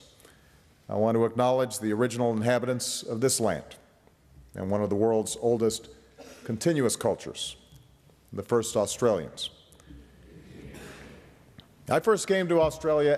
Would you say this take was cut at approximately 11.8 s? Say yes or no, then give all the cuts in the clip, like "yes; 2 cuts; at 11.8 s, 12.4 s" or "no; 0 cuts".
no; 1 cut; at 9.0 s